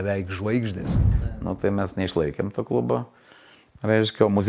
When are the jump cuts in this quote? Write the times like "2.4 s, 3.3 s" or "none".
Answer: 1.1 s